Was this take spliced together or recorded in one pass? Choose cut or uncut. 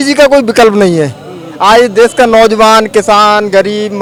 uncut